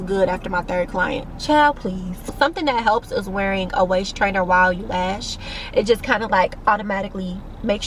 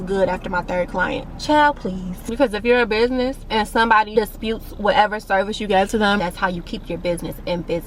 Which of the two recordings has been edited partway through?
second; 3 cuts; at 2.4 s, 4.1 s, 6.2 s

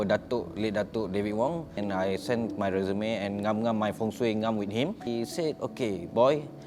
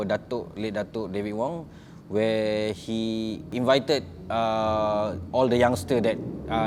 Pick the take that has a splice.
first; 2 cuts; at 1.8 s, 5.1 s

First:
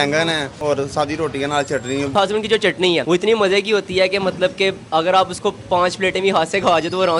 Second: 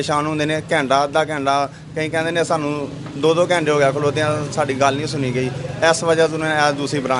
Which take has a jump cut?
first; 2 cuts; at 2.1 s, 3.0 s

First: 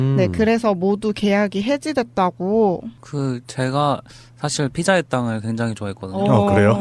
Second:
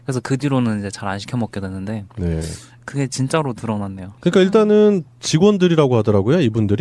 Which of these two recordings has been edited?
second; 1 cut; at 1.5 s

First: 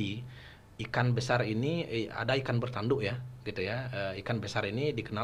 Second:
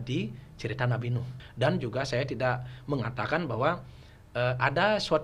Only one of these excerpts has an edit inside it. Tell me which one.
second; 1 cut; at 1.4 s

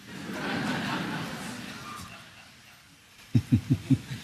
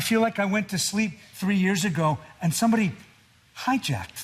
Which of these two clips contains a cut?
first; 1 cut; at 3.1 s

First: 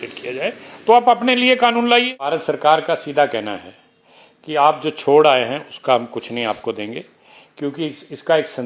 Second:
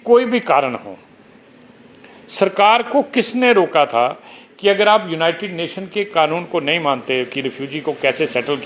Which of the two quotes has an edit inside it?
first; 1 cut; at 2.4 s

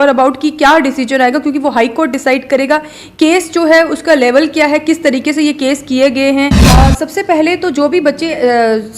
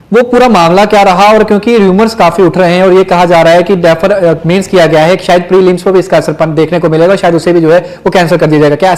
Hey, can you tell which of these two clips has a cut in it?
first; 1 cut; at 6.6 s

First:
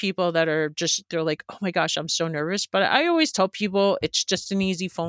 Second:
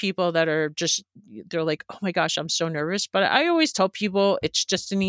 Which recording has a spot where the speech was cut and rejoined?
first; 1 cut; at 1.0 s

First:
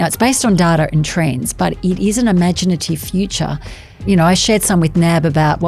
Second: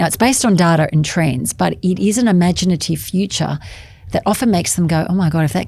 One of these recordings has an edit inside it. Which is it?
first; 1 cut; at 4.0 s

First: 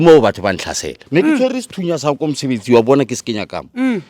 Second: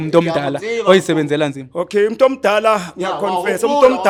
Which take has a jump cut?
first; 1 cut; at 0.9 s

